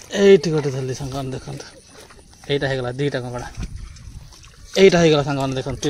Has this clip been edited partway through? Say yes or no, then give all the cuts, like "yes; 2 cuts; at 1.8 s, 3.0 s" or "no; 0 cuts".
no; 0 cuts